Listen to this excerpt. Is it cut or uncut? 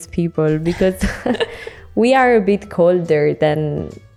uncut